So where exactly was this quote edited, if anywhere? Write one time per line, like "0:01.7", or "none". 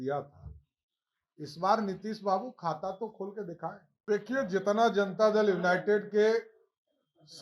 0:03.9